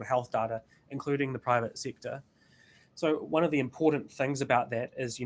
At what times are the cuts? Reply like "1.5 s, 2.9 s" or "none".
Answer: none